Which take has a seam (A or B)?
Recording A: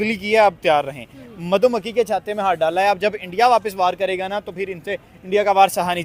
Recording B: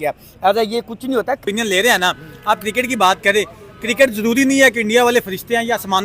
B